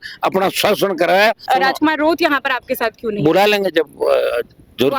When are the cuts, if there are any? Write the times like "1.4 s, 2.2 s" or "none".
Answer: 1.4 s